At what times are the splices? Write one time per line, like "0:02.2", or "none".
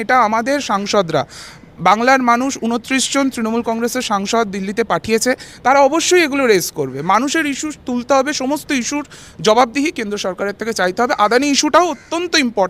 none